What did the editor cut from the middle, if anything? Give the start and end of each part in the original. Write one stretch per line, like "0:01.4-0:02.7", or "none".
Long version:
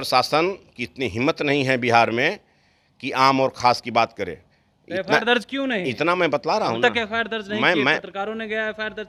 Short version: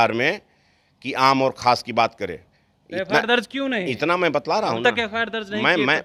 none

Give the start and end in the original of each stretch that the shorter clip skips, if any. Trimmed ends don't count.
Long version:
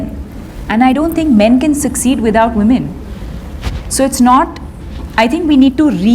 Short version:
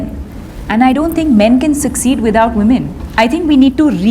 0:03.0-0:05.0

